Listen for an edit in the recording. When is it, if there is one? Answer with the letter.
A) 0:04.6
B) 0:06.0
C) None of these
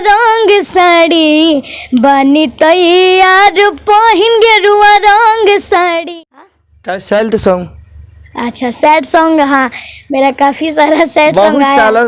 B